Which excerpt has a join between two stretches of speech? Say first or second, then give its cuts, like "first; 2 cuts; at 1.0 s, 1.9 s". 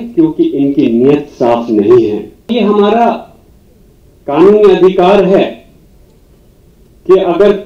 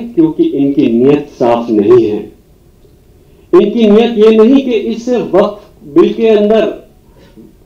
first; 1 cut; at 2.5 s